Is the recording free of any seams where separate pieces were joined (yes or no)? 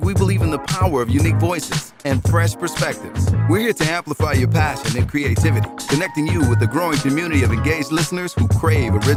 yes